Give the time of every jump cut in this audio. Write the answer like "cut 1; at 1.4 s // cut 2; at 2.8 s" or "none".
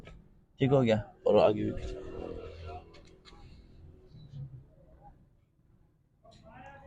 none